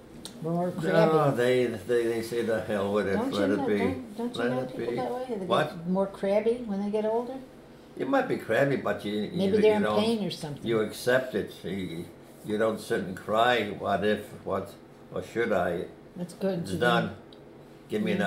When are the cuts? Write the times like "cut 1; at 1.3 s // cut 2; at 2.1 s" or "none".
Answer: none